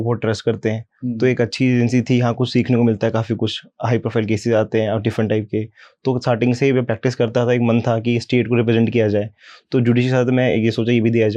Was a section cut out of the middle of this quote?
no; 0 cuts

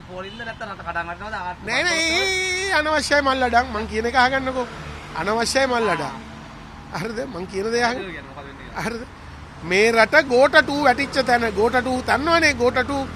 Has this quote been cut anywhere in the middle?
no; 0 cuts

